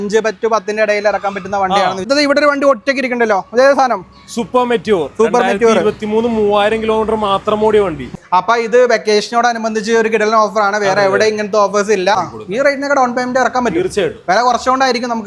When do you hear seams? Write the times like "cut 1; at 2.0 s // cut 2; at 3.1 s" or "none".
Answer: cut 1; at 2.1 s // cut 2; at 8.1 s // cut 3; at 12.3 s